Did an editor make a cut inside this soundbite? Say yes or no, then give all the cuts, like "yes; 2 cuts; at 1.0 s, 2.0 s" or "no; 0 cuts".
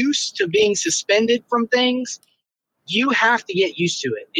no; 0 cuts